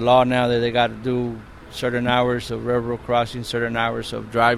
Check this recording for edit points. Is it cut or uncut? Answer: uncut